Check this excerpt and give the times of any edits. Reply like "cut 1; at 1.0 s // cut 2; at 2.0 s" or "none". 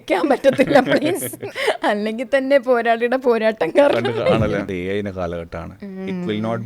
cut 1; at 1.4 s // cut 2; at 4.7 s